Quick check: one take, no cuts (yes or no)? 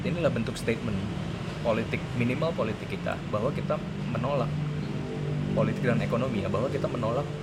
yes